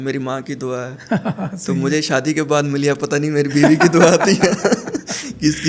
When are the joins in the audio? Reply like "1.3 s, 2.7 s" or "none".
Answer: none